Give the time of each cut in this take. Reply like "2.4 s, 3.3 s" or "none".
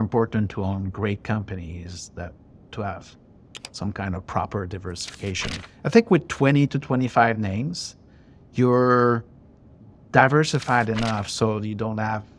none

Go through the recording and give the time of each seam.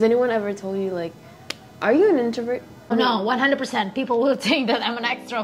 2.9 s

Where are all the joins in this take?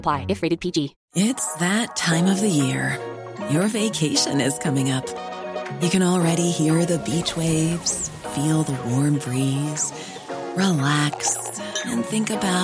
1.0 s

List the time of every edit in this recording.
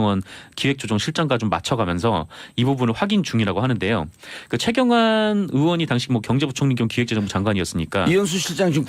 1.2 s

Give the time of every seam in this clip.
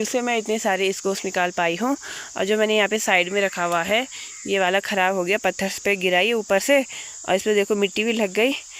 none

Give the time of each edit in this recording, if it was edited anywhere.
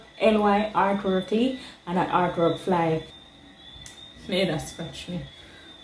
3.2 s

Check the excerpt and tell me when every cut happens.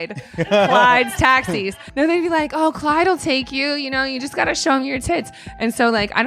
1.8 s

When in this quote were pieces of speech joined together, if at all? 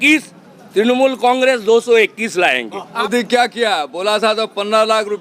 3.1 s

